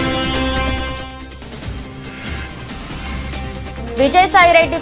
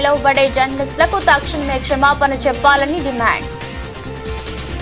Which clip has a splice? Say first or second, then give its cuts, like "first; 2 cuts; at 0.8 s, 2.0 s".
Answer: first; 1 cut; at 2.2 s